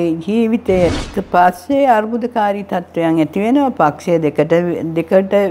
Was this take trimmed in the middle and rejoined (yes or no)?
yes